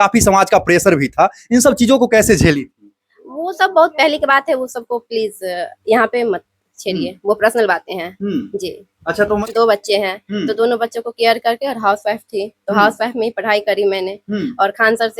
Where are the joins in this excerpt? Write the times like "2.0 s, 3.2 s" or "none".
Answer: 9.4 s